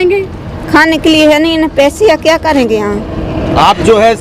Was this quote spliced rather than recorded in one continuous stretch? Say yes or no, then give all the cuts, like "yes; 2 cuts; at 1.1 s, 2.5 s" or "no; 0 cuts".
no; 0 cuts